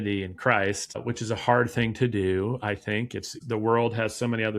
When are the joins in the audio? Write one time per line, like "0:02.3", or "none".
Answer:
0:01.0
0:03.3